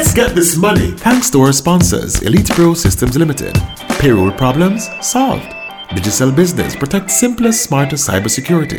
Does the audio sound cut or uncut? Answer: cut